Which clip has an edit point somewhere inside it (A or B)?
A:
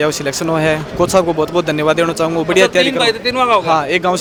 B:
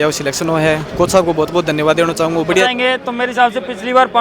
B